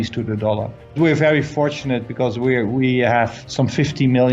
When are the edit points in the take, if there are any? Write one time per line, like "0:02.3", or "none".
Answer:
0:01.0
0:03.4